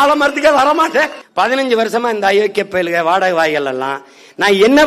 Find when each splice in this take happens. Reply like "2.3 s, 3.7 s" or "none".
1.2 s